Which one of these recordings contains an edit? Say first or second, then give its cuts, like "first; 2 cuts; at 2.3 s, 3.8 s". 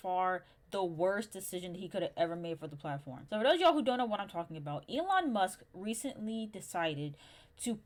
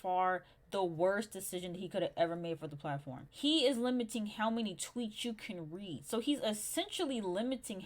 second; 1 cut; at 3.3 s